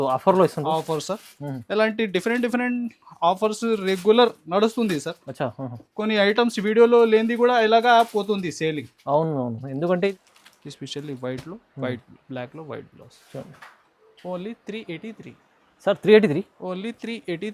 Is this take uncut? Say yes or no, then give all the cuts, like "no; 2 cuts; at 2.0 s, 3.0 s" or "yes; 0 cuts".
no; 1 cut; at 10.1 s